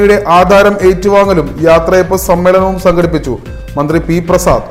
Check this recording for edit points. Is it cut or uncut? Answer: uncut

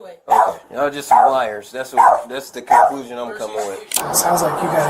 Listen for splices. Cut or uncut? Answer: cut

